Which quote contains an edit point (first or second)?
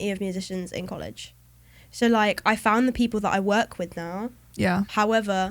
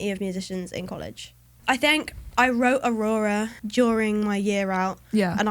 second